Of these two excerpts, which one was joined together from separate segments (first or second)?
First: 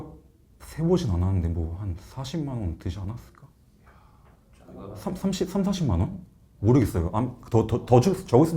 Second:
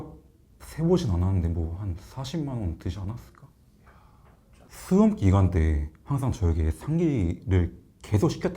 second